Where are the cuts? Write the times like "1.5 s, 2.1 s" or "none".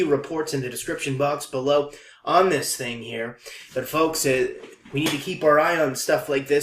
2.8 s